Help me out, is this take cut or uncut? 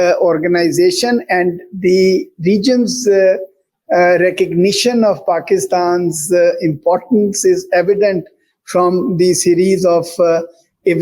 uncut